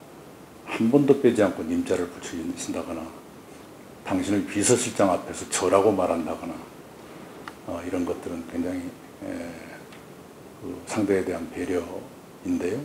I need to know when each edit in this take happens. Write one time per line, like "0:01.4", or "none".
none